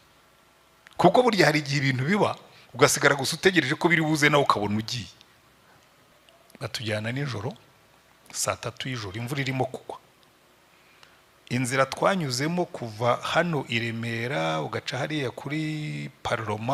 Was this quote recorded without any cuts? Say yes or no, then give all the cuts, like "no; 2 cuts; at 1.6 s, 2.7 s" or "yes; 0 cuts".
no; 1 cut; at 6.1 s